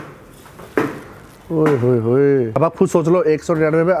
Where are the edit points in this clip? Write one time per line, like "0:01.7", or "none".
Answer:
0:02.6